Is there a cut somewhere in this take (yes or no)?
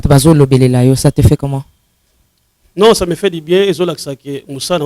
no